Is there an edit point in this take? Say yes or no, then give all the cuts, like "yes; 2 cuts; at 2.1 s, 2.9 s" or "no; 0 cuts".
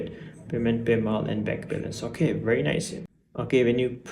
yes; 1 cut; at 3.0 s